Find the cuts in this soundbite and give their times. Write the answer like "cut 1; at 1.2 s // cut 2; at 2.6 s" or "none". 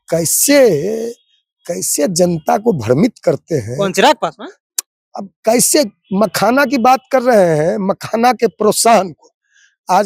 none